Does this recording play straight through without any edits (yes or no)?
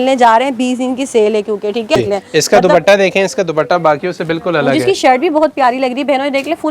no